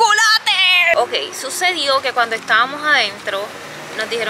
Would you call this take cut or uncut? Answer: cut